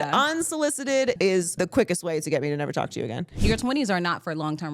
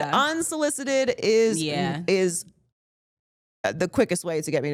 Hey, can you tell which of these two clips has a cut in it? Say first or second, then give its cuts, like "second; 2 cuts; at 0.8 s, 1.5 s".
first; 2 cuts; at 1.2 s, 3.3 s